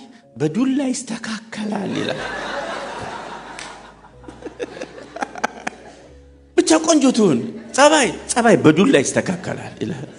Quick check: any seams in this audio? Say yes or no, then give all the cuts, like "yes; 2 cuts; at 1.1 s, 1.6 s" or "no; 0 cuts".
no; 0 cuts